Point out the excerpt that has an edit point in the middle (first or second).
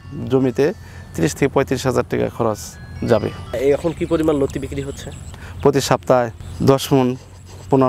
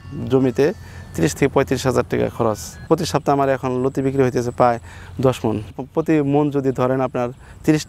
second